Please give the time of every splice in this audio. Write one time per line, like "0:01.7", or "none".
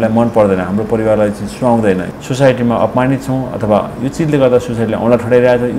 0:02.1

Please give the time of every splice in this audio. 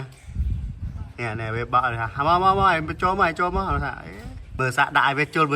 0:04.6

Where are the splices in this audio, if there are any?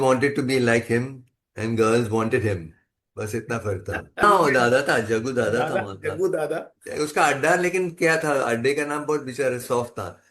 0:04.2

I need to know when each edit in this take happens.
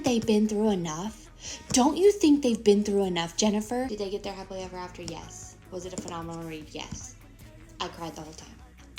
none

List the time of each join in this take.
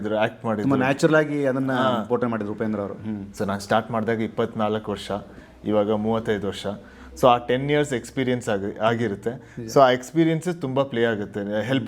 0:03.3

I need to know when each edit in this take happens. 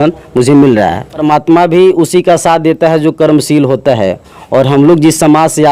0:01.2

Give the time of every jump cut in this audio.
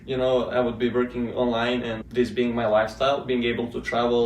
0:02.0

